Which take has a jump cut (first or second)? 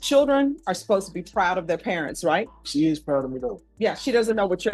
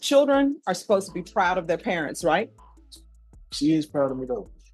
first